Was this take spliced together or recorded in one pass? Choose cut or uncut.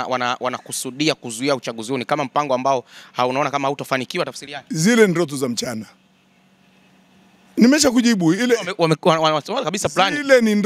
uncut